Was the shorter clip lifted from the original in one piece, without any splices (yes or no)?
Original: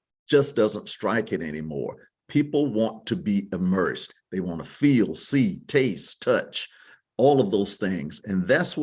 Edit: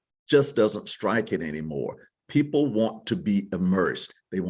yes